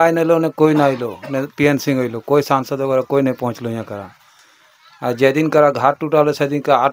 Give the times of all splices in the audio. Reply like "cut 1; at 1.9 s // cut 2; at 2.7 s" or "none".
none